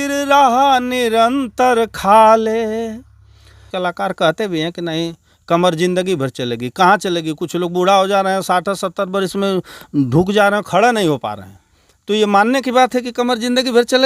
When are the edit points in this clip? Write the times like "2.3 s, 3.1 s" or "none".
3.6 s